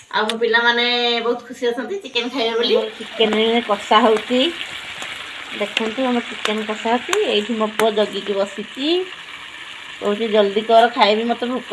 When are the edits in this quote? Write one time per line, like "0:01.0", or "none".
0:03.0